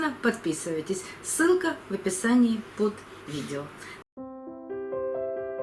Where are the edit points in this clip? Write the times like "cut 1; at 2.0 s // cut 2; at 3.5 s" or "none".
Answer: cut 1; at 3.8 s